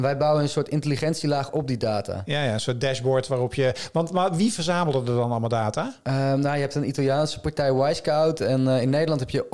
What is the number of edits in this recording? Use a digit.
0